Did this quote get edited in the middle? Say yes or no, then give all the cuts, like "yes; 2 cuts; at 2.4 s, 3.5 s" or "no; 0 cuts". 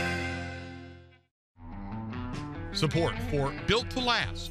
yes; 2 cuts; at 1.3 s, 2.8 s